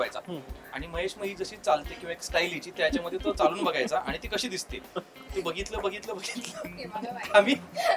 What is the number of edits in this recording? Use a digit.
0